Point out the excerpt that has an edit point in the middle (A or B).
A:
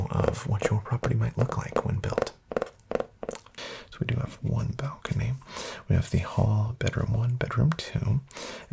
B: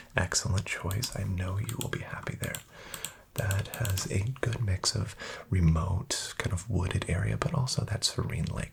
A